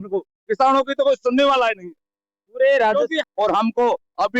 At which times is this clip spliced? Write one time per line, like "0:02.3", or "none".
0:03.2